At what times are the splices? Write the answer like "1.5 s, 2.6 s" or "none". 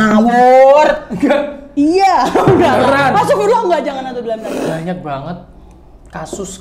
4.5 s